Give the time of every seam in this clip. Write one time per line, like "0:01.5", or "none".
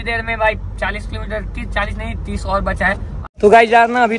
0:03.1